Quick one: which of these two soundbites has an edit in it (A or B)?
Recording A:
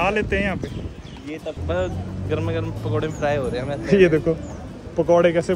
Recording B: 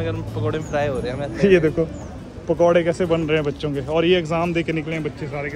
A